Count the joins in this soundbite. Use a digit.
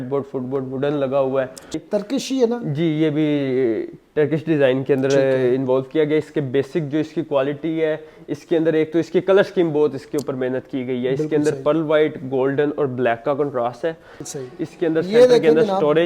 2